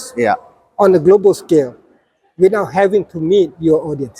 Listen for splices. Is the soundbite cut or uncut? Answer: uncut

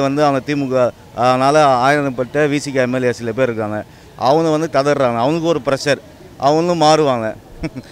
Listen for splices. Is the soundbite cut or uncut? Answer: uncut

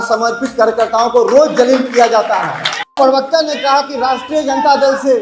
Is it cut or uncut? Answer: cut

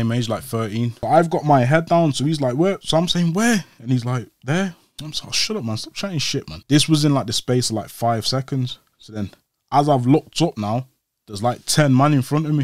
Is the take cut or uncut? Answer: cut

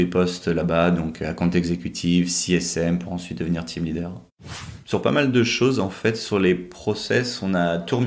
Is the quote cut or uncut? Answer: cut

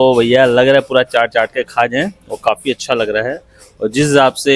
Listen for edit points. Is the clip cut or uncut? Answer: uncut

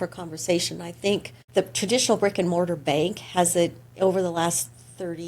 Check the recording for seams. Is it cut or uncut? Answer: cut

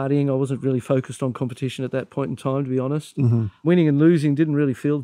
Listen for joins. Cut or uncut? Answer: cut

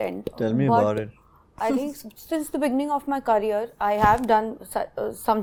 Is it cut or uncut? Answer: uncut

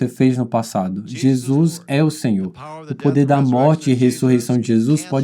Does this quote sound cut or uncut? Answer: uncut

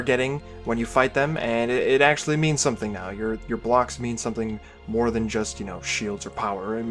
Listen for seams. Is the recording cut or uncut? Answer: uncut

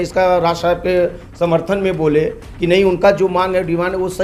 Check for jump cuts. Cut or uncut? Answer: uncut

